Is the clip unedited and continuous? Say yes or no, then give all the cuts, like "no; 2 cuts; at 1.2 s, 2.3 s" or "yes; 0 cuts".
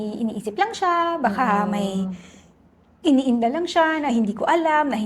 yes; 0 cuts